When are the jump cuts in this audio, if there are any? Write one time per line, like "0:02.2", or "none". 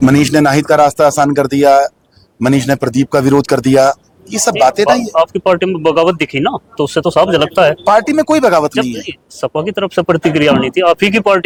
none